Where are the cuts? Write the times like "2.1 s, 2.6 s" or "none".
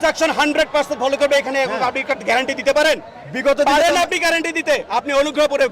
none